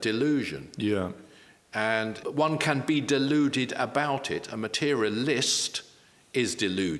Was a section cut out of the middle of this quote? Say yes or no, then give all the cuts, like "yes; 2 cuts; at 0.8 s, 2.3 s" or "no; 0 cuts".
yes; 1 cut; at 2.2 s